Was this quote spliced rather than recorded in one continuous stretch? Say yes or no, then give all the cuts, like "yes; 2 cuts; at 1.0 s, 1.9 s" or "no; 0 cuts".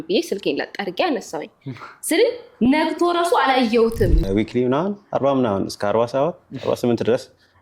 yes; 1 cut; at 4.2 s